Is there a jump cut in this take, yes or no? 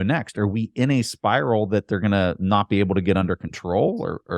no